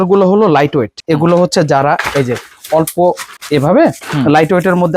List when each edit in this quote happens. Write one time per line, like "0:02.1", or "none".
0:01.0
0:03.3